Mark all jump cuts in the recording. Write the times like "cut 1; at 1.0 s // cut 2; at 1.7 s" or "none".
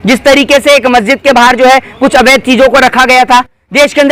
none